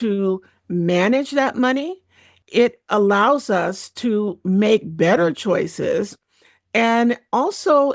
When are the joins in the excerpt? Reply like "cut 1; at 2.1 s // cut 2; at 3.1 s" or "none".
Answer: cut 1; at 2.3 s